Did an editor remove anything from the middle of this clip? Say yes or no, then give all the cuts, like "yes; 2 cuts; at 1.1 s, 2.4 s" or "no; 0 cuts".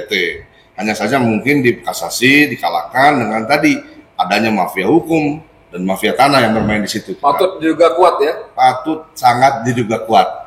no; 0 cuts